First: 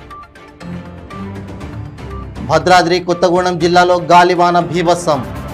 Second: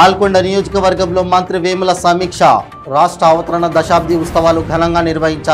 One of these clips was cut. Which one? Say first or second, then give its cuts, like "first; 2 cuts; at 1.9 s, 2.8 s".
first; 1 cut; at 1.2 s